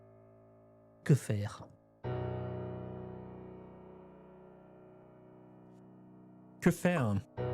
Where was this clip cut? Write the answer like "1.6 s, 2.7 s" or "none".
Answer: 1.0 s

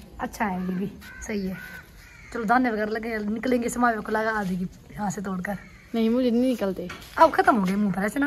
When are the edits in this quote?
none

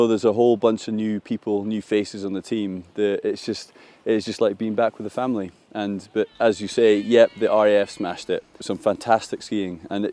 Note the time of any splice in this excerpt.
8.7 s

